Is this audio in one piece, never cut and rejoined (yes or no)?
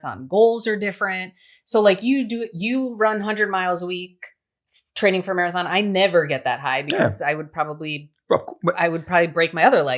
yes